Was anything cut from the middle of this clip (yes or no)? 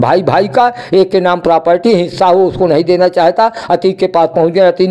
no